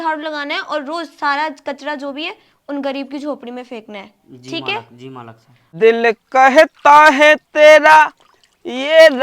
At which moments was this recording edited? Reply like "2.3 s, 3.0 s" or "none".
5.7 s